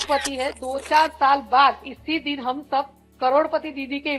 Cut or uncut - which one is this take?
uncut